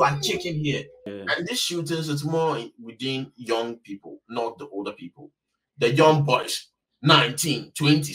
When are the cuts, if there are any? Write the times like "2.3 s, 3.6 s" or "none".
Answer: 1.1 s